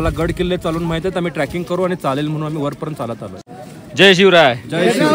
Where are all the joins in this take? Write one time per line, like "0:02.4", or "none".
0:03.4